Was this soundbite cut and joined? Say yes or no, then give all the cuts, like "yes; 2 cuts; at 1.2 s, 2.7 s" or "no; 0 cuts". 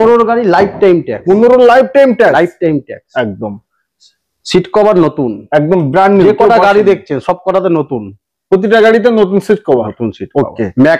no; 0 cuts